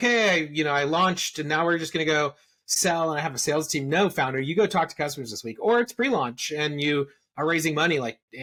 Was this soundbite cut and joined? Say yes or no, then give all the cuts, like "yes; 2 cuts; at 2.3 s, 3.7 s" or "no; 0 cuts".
no; 0 cuts